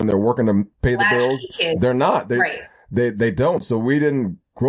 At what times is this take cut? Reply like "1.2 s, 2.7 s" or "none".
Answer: none